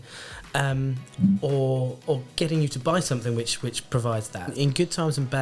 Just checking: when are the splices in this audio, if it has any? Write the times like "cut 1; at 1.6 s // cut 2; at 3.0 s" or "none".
cut 1; at 4.5 s